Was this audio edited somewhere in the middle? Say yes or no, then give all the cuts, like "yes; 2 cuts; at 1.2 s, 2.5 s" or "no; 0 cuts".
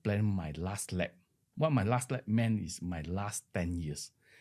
no; 0 cuts